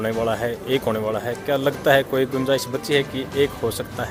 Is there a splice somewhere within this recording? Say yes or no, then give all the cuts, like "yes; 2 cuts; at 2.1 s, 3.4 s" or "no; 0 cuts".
no; 0 cuts